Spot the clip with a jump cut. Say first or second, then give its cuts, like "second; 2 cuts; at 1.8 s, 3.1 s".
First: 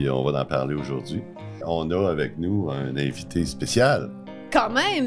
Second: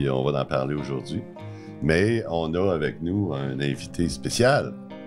first; 1 cut; at 1.6 s